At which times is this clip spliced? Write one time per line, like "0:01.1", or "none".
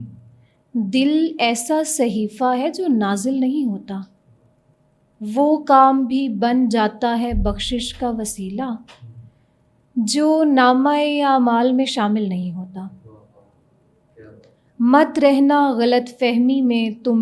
none

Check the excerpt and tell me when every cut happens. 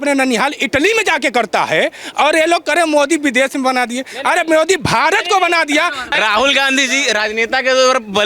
0:06.1

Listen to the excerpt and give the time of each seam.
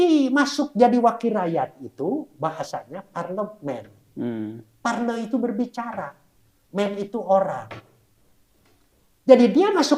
none

